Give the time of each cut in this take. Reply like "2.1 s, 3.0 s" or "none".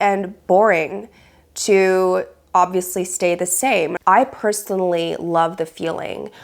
3.9 s